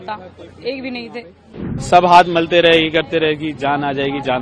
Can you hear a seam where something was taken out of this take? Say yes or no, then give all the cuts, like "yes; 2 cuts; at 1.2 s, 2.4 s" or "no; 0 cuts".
yes; 1 cut; at 1.7 s